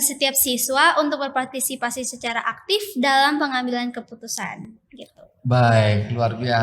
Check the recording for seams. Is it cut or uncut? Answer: uncut